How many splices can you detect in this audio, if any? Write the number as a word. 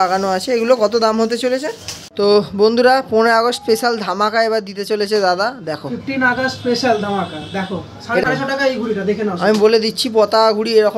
two